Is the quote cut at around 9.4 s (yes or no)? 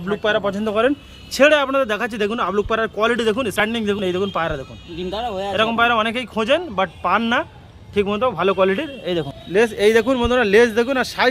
yes